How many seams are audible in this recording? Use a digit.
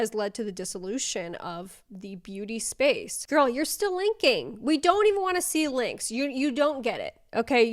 1